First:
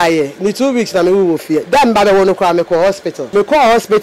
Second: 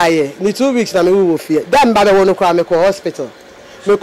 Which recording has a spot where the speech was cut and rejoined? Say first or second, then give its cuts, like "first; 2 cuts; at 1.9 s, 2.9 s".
first; 1 cut; at 3.1 s